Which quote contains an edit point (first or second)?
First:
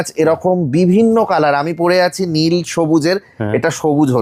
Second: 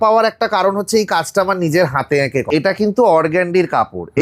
second